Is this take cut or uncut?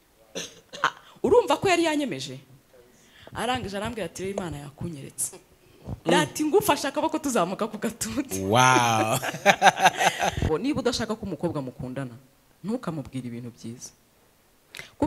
cut